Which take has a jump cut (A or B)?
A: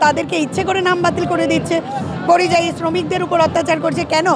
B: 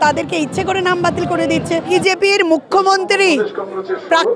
B